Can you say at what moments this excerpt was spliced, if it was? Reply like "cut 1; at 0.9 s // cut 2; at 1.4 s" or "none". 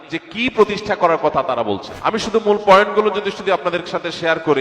cut 1; at 1.9 s